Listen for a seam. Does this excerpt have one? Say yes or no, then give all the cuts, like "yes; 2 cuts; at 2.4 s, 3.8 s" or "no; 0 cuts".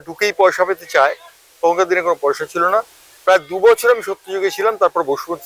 no; 0 cuts